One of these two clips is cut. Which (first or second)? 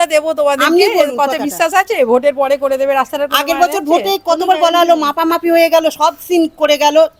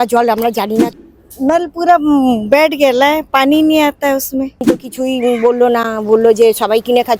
second